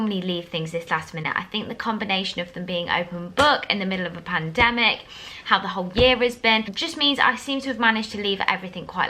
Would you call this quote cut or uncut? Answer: uncut